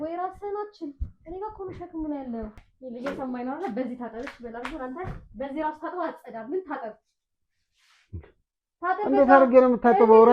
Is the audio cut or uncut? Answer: cut